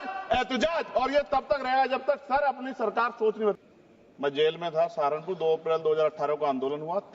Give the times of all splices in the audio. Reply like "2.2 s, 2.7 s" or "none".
3.6 s